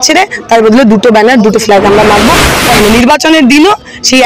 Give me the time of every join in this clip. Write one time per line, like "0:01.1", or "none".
0:02.7

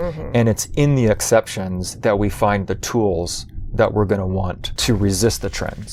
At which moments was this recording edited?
none

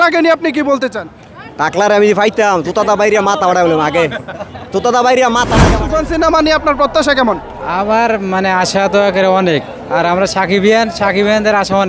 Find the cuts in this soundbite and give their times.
0:05.7

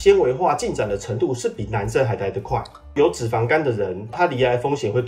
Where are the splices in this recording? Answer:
0:02.9
0:04.1

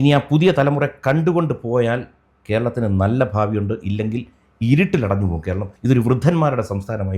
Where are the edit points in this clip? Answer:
0:05.7

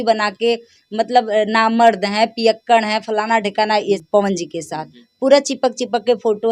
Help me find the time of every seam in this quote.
0:04.0

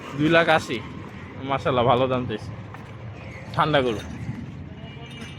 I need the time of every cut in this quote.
none

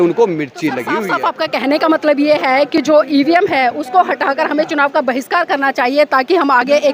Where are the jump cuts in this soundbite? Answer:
0:00.9

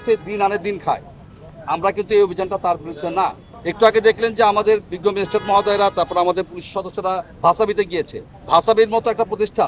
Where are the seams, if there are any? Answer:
none

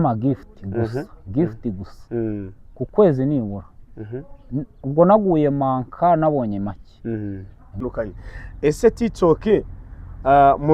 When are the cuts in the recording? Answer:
0:07.8

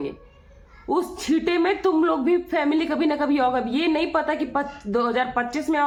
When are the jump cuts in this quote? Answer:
none

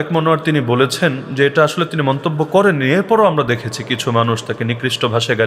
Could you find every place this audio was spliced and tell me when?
none

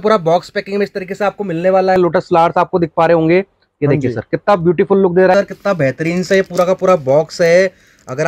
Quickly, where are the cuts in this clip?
0:02.0
0:05.3

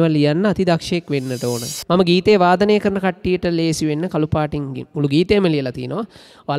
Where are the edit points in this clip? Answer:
0:01.7

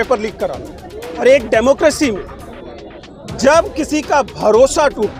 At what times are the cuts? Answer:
0:01.2

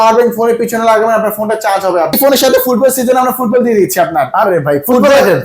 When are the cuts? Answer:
0:02.2

